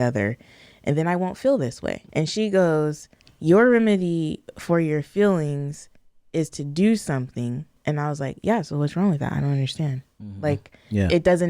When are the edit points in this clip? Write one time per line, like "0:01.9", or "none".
0:01.9
0:07.7